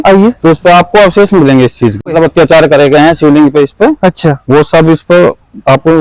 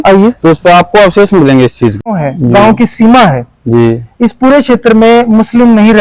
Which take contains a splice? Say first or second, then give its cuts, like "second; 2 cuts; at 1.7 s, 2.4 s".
second; 1 cut; at 2.1 s